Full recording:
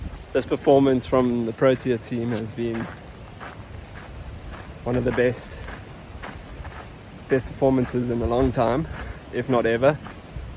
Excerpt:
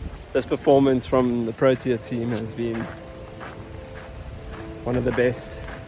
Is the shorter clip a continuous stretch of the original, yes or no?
yes